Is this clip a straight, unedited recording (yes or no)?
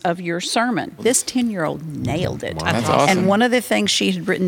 no